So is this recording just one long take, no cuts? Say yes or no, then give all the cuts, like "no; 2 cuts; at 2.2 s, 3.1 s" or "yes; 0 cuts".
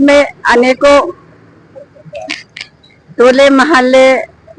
yes; 0 cuts